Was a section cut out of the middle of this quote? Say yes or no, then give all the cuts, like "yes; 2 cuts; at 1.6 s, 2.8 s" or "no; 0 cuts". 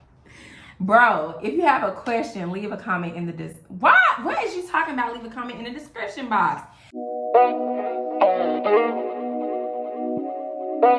yes; 1 cut; at 6.8 s